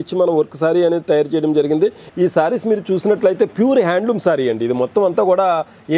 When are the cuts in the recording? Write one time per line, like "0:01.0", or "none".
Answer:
0:02.0